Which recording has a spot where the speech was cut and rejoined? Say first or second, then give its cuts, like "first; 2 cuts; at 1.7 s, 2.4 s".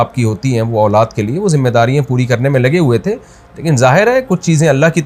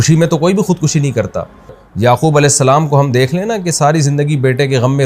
second; 1 cut; at 1.8 s